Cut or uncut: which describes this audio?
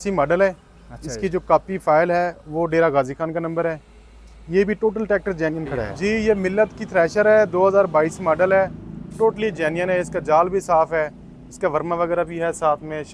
cut